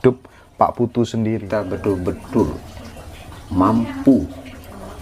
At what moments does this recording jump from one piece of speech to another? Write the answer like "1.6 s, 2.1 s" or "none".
1.6 s